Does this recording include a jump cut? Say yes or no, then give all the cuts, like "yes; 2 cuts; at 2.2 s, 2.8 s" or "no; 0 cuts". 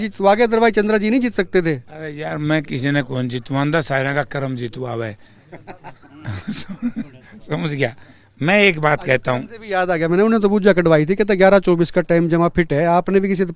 no; 0 cuts